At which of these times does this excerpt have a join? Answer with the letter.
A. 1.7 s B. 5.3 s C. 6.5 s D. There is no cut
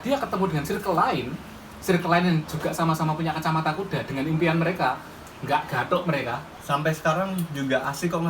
C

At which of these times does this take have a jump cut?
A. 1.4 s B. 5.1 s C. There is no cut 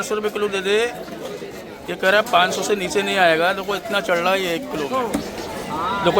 B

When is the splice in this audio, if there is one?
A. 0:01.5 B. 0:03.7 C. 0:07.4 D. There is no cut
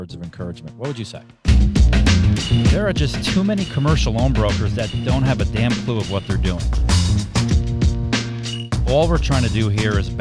A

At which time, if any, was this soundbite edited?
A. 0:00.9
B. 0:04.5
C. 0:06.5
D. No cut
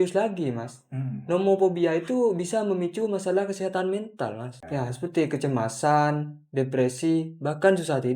B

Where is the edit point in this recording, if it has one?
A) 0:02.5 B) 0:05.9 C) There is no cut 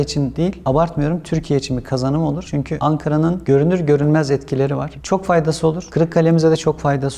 C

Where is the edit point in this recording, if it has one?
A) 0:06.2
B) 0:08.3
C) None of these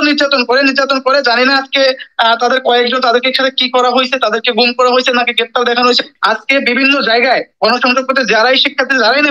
A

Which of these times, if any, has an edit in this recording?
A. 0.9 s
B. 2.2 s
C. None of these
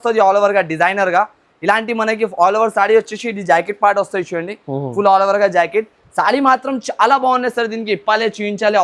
C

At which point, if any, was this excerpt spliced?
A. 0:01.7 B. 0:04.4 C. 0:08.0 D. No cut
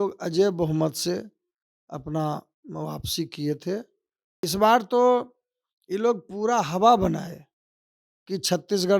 B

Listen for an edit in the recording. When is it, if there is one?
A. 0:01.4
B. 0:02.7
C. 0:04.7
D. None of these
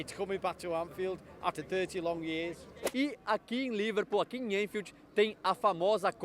B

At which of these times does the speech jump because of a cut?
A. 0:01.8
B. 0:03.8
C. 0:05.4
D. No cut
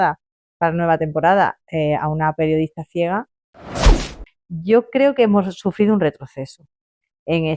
B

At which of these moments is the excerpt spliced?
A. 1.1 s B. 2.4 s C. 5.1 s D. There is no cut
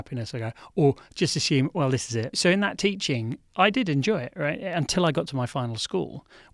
B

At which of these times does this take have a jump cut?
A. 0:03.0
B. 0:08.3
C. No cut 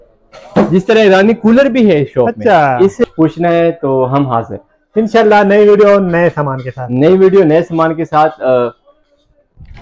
A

